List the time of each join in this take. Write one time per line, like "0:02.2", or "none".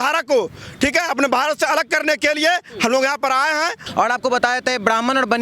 0:03.8